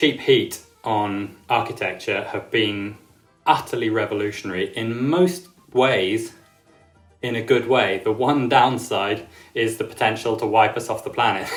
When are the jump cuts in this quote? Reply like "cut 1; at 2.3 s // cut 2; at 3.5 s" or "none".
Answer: none